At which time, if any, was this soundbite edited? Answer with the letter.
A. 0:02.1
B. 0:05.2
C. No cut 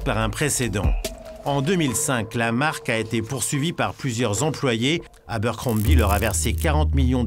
B